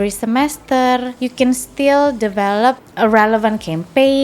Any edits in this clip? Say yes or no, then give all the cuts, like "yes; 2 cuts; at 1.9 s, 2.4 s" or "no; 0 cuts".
yes; 2 cuts; at 1.2 s, 2.9 s